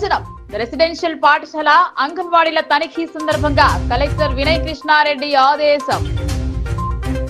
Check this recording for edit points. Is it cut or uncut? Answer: uncut